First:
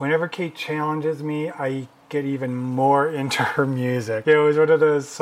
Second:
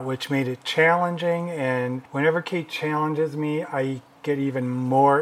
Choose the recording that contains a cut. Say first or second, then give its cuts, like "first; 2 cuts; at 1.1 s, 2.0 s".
first; 1 cut; at 4.1 s